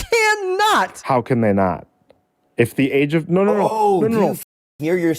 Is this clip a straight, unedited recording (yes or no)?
no